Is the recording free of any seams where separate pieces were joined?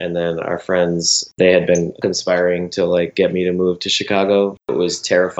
no; 3 cuts; at 1.3 s, 2.0 s, 4.7 s

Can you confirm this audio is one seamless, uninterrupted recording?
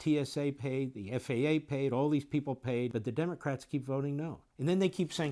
no; 2 cuts; at 2.9 s, 4.4 s

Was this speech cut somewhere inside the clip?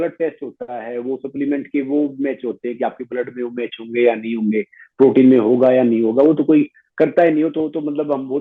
no; 0 cuts

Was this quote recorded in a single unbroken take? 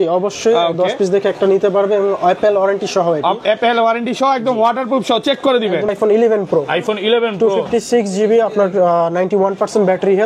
no; 1 cut; at 5.9 s

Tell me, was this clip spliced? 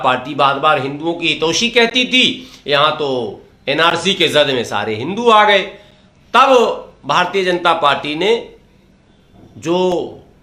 no; 0 cuts

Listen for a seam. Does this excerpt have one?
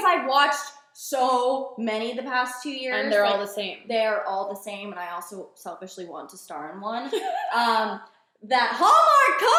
no; 0 cuts

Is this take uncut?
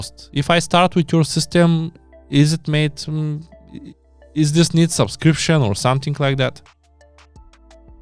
yes; 0 cuts

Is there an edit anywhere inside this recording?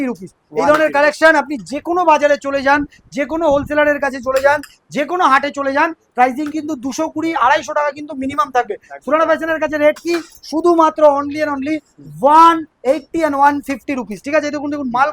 no; 0 cuts

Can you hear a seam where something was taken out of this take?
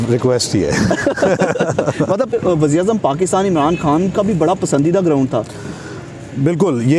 no; 0 cuts

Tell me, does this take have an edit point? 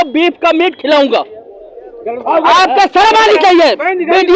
no; 0 cuts

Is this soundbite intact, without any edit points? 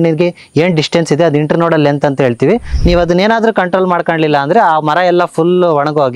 no; 1 cut; at 2.7 s

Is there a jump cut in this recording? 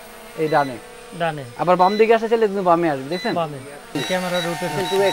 yes; 1 cut; at 3.9 s

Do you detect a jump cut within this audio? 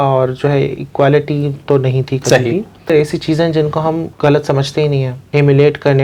yes; 3 cuts; at 2.8 s, 4.1 s, 5.2 s

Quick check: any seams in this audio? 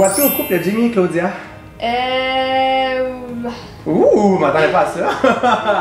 no; 0 cuts

